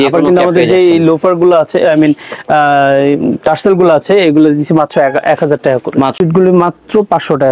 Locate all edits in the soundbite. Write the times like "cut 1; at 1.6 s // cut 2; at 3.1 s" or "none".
cut 1; at 6.1 s